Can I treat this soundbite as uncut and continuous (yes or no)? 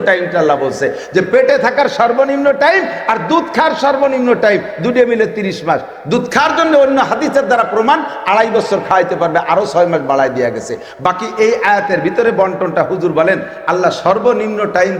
yes